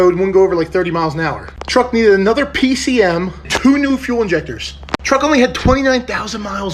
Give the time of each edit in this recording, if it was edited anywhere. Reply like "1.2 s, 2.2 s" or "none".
1.5 s, 3.5 s